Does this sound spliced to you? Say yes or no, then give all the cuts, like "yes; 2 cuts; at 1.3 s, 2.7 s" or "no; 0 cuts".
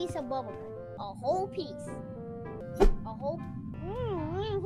yes; 3 cuts; at 0.9 s, 2.6 s, 3.7 s